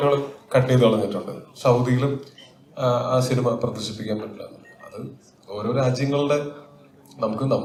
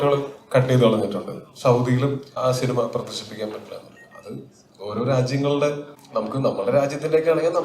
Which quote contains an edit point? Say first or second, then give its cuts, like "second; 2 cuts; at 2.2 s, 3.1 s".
second; 2 cuts; at 2.4 s, 5.9 s